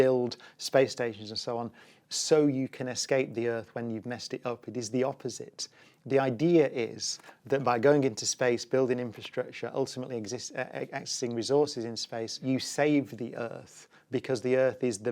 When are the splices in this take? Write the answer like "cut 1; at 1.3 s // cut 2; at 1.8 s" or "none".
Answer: cut 1; at 12.4 s